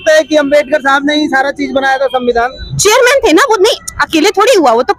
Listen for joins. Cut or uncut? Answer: uncut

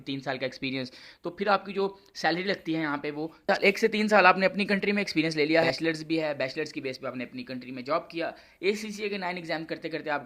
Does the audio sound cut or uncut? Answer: cut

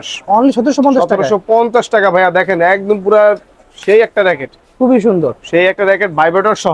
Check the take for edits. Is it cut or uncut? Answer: uncut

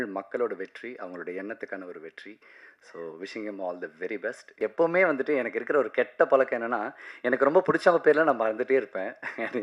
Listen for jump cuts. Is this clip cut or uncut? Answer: cut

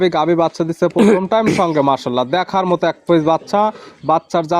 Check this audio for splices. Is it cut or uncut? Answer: uncut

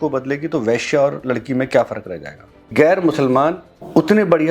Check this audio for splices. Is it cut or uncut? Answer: cut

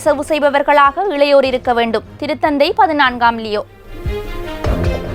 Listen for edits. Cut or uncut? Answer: uncut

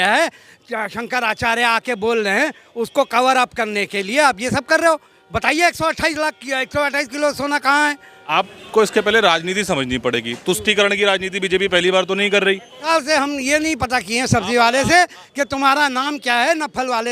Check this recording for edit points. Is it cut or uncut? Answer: cut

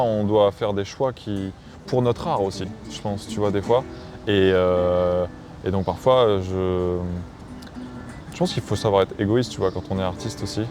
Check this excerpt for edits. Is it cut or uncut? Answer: uncut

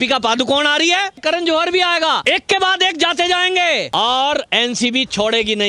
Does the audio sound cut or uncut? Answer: cut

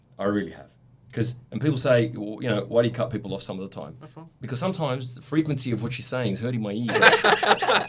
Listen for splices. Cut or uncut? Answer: cut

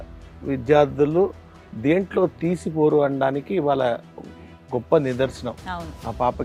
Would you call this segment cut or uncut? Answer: uncut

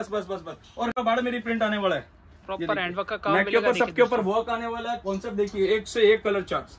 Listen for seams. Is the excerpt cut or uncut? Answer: cut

